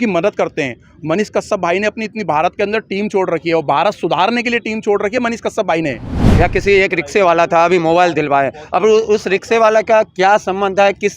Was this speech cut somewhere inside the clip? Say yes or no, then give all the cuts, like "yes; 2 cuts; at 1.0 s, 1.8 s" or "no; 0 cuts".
yes; 1 cut; at 6.2 s